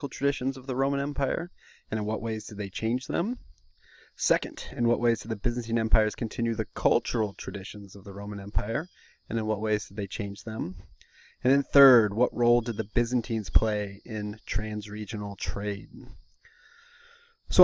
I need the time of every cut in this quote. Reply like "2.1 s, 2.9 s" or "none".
none

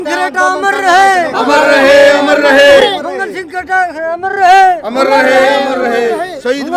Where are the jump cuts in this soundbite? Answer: none

